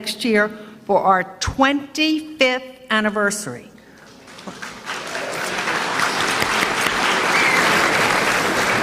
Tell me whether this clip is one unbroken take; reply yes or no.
no